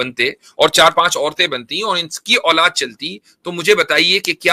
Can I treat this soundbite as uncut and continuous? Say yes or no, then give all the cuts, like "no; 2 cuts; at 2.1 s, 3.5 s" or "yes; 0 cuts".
yes; 0 cuts